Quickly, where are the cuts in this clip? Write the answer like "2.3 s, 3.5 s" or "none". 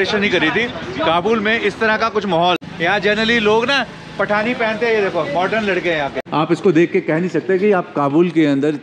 2.6 s, 6.2 s